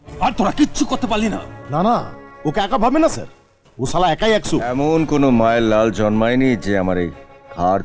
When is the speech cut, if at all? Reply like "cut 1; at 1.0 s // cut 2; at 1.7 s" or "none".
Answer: cut 1; at 4.7 s

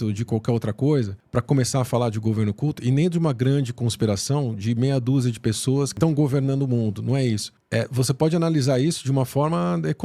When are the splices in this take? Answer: cut 1; at 1.2 s // cut 2; at 5.9 s

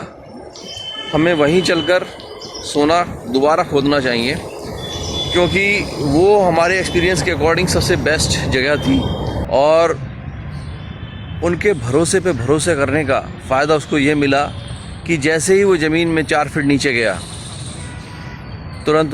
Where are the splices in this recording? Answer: cut 1; at 9.4 s

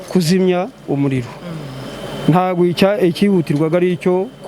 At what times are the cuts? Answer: none

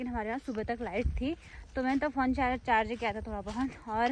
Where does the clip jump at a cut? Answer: none

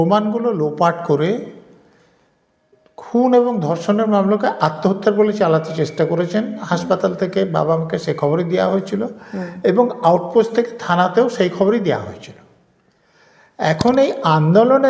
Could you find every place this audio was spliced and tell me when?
none

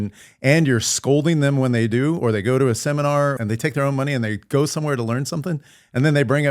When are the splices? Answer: cut 1; at 3.4 s

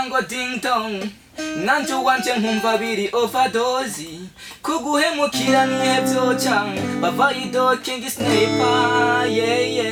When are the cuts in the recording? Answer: none

